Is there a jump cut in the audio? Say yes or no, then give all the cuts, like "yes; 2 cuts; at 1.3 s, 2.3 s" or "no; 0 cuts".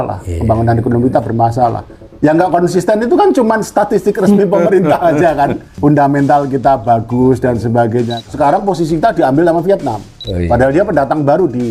yes; 2 cuts; at 5.7 s, 8.2 s